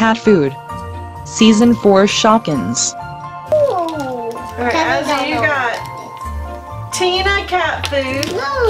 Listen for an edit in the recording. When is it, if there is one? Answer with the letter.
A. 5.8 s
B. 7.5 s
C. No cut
C